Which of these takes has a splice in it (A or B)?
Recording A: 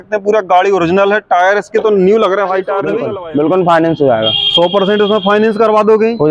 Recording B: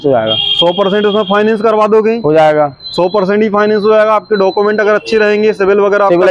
A